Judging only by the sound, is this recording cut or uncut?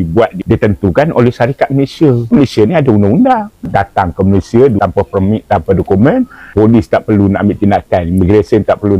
uncut